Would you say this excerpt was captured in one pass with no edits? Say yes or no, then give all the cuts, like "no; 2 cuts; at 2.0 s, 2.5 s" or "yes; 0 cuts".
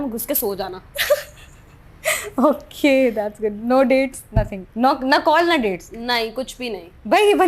yes; 0 cuts